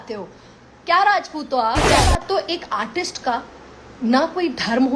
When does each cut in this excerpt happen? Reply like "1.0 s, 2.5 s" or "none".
2.0 s